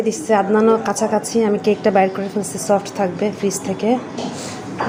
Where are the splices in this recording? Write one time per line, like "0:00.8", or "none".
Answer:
none